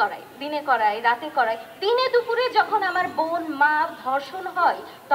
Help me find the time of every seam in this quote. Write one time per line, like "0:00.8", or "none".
none